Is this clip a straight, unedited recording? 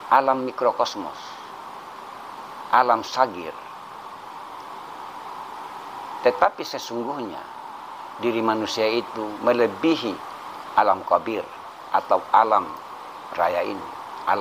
yes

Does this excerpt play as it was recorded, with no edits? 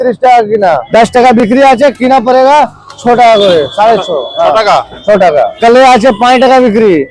no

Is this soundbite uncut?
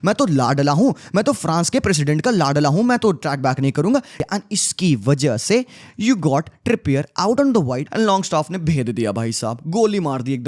no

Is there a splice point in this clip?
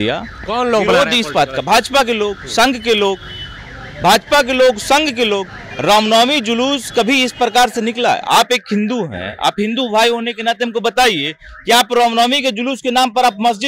no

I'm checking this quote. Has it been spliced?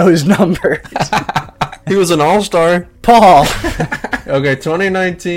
yes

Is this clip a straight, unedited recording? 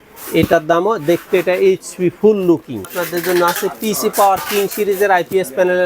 no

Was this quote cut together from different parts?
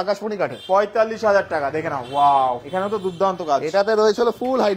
no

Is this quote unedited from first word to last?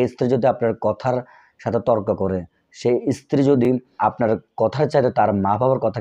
no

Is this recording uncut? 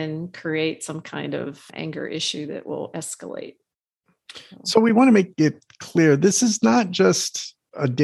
yes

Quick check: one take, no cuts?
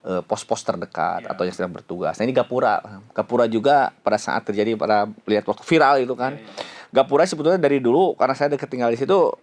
yes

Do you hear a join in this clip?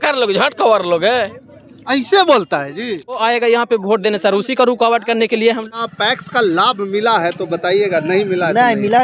yes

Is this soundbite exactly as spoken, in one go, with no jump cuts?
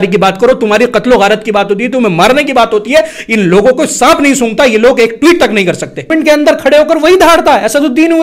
no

